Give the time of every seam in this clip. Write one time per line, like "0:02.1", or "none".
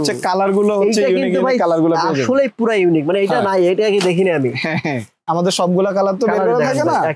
0:05.1